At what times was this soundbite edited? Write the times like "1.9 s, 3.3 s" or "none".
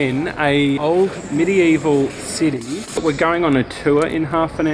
1.2 s, 3.0 s